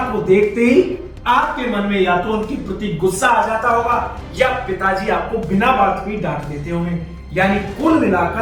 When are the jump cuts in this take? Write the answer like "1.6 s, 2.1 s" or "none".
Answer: none

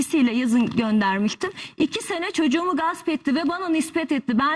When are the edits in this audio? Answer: none

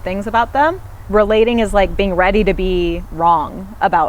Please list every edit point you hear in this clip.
0.9 s

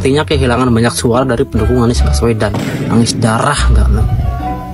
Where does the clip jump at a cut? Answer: none

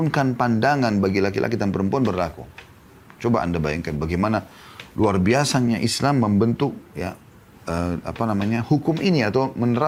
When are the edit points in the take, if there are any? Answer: none

